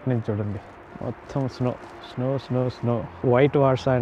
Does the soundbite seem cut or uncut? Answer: uncut